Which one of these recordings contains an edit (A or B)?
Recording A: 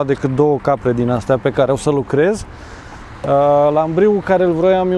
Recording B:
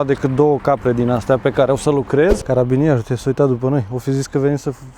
B